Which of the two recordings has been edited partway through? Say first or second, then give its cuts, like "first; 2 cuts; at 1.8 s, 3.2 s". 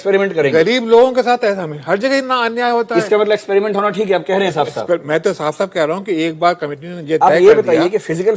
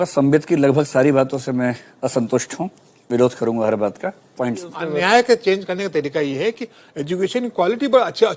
second; 1 cut; at 4.9 s